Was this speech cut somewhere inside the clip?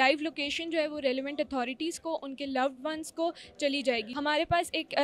yes; 1 cut; at 4.1 s

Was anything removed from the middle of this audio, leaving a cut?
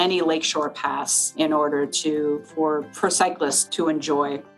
yes; 3 cuts; at 1.3 s, 2.9 s, 3.6 s

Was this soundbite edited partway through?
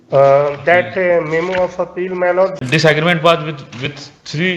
yes; 1 cut; at 2.6 s

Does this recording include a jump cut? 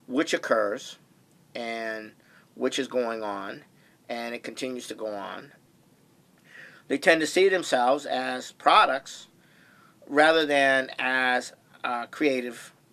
no; 0 cuts

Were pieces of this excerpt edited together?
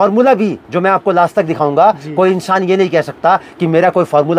no; 0 cuts

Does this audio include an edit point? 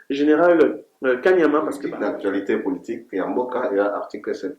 yes; 1 cut; at 1.8 s

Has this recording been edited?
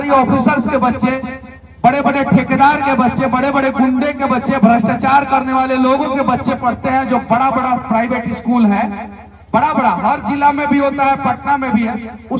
no; 0 cuts

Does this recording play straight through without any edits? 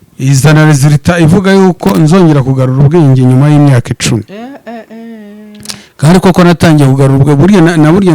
yes; 0 cuts

